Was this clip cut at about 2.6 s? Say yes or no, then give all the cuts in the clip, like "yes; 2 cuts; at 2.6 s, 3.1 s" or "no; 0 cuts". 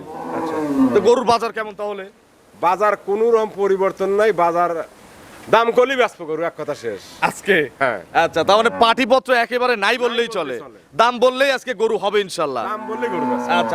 no; 0 cuts